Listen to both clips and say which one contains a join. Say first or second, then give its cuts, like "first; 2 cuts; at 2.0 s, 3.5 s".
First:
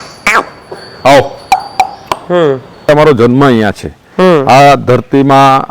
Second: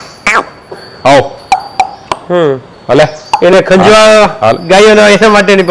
first; 1 cut; at 2.9 s